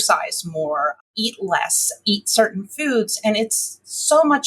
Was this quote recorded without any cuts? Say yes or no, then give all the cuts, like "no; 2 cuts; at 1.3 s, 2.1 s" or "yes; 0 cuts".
no; 1 cut; at 1.1 s